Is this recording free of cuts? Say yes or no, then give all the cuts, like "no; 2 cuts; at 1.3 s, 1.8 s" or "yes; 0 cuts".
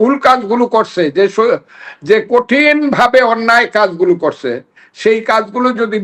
yes; 0 cuts